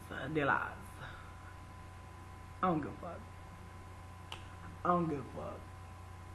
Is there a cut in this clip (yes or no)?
yes